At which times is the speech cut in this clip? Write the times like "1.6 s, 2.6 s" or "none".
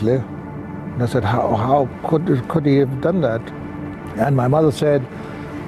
none